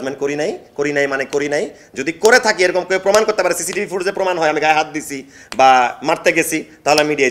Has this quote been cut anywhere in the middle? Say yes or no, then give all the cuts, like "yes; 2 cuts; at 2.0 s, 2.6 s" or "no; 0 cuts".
no; 0 cuts